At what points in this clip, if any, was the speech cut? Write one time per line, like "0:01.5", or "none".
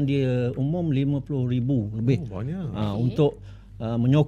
none